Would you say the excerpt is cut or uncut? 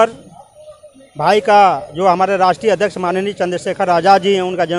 uncut